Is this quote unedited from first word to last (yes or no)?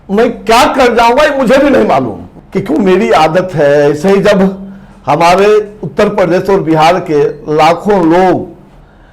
yes